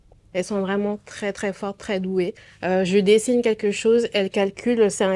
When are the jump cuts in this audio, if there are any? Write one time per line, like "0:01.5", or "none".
0:02.5